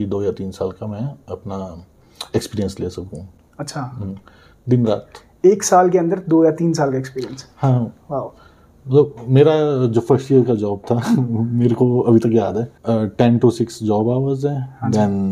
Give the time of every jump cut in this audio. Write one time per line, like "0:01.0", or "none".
none

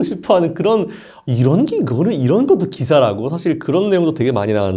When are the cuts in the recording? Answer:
none

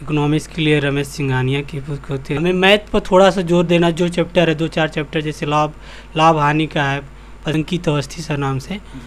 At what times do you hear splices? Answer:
0:02.4
0:07.5

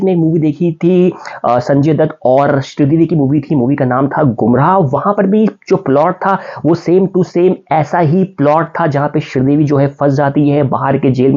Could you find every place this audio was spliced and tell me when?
none

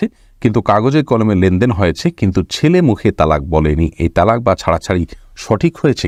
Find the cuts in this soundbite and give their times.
none

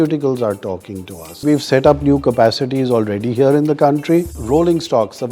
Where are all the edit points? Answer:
0:01.4
0:04.4

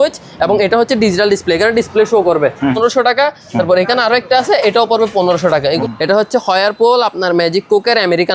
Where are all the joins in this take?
0:02.8
0:05.8

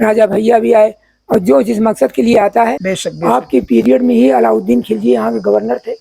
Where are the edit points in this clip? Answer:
0:02.8

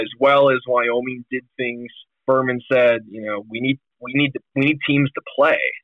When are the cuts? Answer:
0:02.2

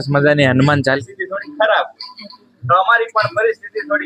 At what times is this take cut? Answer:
0:01.0

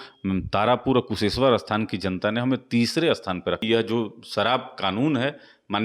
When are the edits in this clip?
0:03.6

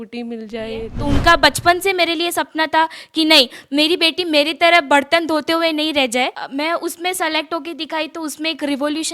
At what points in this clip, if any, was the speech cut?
0:00.9
0:06.4

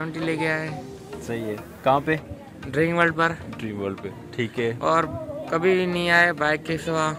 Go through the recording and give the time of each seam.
none

